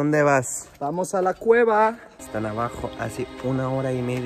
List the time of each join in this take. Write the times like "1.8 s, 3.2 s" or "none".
2.1 s